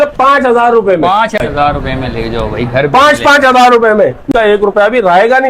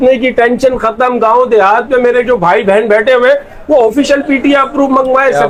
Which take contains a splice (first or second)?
first